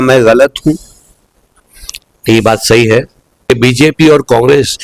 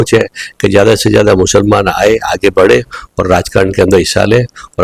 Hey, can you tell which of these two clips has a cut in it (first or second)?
first